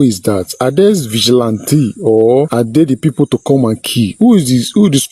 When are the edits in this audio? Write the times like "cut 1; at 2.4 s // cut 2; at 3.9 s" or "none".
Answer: cut 1; at 2.5 s